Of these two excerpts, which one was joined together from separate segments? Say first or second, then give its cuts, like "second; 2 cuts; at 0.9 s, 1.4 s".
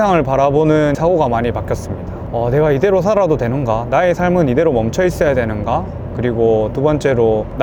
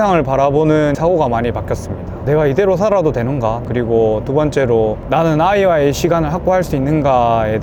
second; 2 cuts; at 2.2 s, 3.6 s